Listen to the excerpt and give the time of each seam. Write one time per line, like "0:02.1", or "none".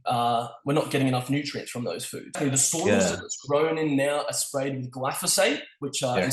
0:02.4